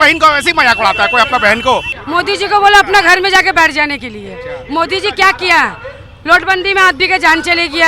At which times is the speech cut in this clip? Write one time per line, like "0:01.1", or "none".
0:01.9

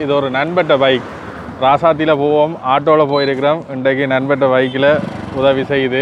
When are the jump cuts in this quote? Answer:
none

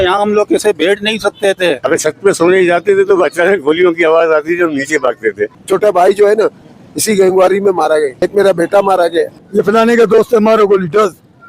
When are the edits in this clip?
0:01.8
0:05.6
0:08.2
0:09.4

